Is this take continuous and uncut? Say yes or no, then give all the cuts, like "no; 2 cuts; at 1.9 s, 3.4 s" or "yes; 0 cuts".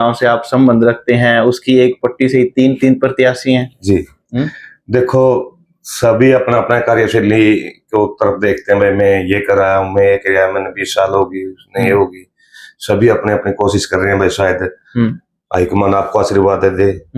yes; 0 cuts